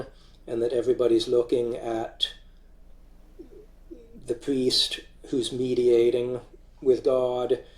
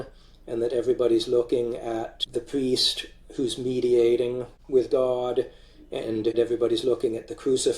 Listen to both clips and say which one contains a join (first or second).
second